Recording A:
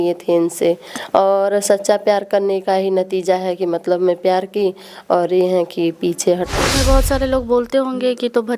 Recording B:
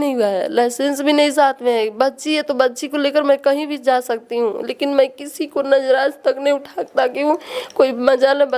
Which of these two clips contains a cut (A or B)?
A